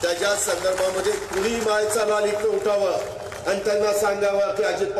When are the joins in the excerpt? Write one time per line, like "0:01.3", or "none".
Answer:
none